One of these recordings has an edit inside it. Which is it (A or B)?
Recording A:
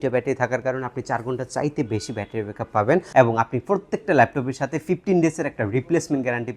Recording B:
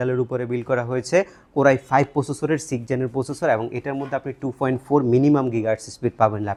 A